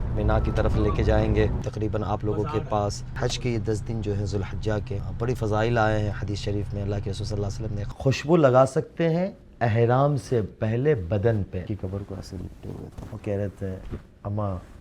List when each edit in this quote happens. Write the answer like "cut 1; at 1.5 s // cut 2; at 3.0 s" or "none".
cut 1; at 1.6 s // cut 2; at 3.1 s // cut 3; at 5.0 s // cut 4; at 7.8 s // cut 5; at 11.7 s // cut 6; at 13.0 s